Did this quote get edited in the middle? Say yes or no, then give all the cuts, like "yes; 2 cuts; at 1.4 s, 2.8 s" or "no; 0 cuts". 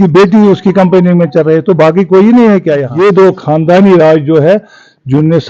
yes; 1 cut; at 2.9 s